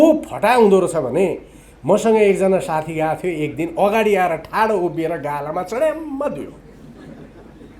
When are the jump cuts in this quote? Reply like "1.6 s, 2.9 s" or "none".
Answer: none